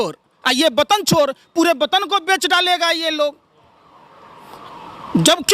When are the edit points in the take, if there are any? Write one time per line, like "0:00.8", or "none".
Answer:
none